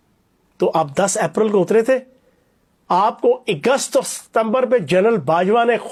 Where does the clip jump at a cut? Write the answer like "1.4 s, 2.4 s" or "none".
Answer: none

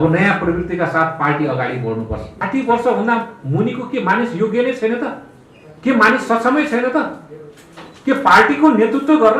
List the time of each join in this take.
2.4 s

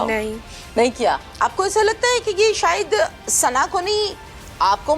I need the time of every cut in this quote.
1.3 s

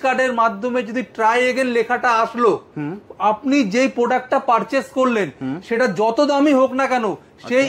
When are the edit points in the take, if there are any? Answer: none

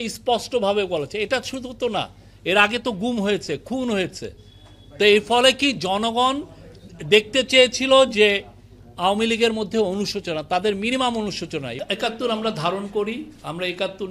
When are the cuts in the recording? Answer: 11.7 s

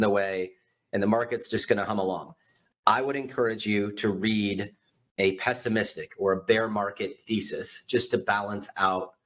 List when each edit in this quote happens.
none

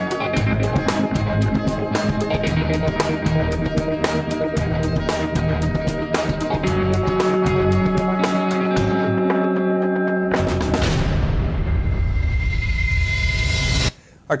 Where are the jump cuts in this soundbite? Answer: 9.0 s

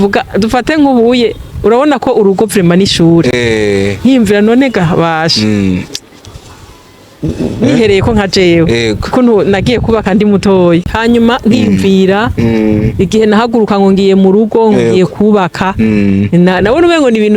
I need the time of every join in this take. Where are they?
10.8 s

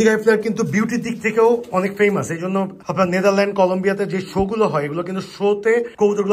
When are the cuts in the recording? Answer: none

